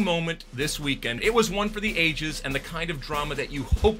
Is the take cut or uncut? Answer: cut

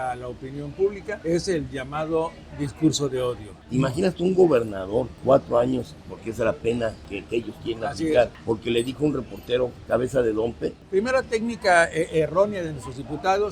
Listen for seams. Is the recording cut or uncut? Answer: cut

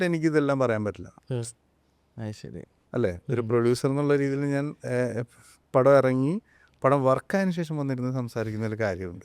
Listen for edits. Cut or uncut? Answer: uncut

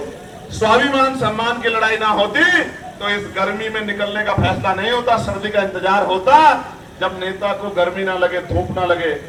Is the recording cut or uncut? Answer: uncut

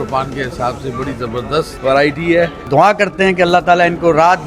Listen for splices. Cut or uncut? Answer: cut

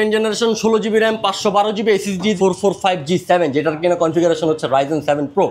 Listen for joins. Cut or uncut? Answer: cut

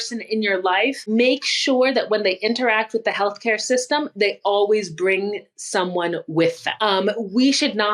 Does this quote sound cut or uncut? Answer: cut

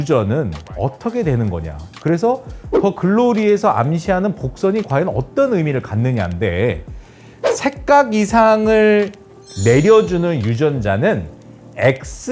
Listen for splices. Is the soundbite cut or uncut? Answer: uncut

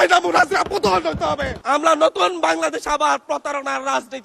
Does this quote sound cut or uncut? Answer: cut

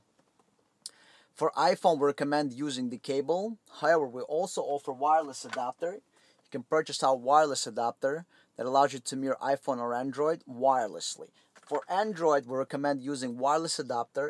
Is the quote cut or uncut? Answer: uncut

